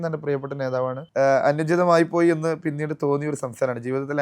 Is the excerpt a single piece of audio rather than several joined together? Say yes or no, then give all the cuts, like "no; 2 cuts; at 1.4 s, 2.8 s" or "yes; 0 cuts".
no; 1 cut; at 1.0 s